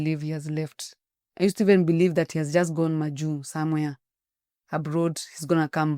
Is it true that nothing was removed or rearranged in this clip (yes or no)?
yes